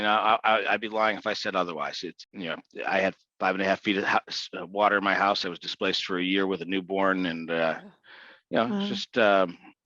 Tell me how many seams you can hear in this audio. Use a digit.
1